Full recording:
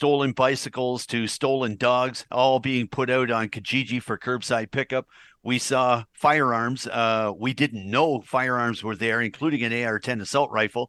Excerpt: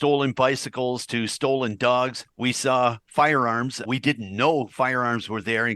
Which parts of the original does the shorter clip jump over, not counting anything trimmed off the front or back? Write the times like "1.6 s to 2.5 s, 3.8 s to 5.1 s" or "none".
2.2 s to 5.3 s, 6.9 s to 7.4 s